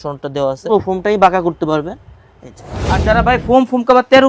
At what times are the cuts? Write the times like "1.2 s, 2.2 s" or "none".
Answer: 0.7 s, 3.0 s